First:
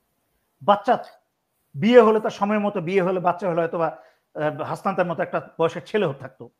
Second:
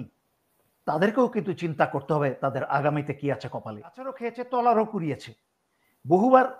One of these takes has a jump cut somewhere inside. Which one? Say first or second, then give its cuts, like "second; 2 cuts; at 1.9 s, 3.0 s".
second; 1 cut; at 4.2 s